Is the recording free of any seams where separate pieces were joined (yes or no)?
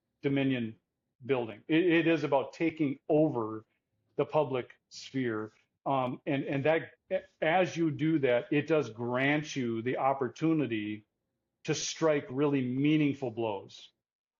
yes